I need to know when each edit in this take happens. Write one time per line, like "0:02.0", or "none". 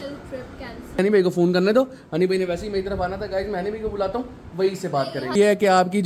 0:01.0
0:05.3